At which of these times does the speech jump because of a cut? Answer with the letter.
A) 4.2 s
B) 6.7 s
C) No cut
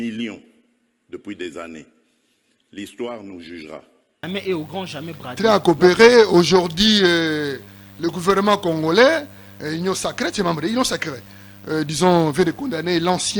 A